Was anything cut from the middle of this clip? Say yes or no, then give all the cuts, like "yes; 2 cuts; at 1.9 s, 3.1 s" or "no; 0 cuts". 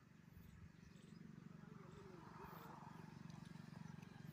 no; 0 cuts